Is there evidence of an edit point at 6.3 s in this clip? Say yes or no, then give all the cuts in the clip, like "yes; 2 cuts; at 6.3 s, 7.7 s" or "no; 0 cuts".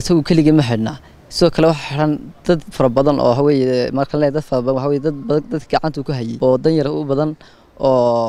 yes; 1 cut; at 6.3 s